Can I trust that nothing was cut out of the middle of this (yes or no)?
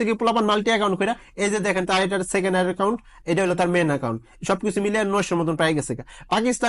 yes